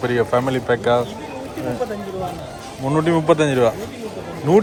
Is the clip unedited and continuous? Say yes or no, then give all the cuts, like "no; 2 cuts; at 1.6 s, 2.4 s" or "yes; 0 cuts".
yes; 0 cuts